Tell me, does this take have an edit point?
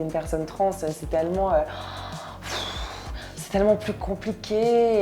no; 0 cuts

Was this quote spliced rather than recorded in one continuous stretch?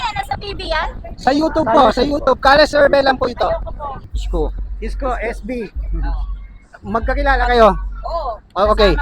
yes; 1 cut; at 4.1 s

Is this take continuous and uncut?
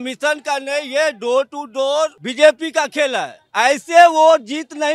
yes; 0 cuts

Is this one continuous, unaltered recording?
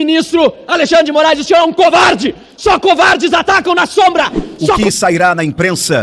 no; 1 cut; at 4.8 s

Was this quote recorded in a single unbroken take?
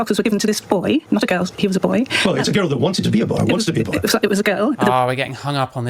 yes; 0 cuts

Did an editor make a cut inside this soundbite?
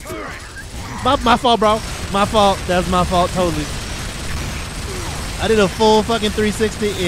no; 0 cuts

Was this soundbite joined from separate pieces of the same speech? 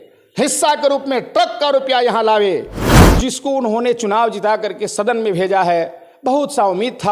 yes; 1 cut; at 3.2 s

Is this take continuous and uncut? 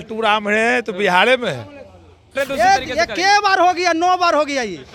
no; 1 cut; at 2.3 s

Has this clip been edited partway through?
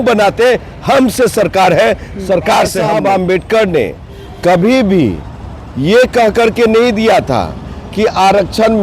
yes; 1 cut; at 2.8 s

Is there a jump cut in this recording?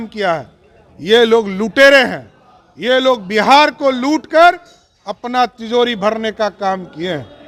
no; 0 cuts

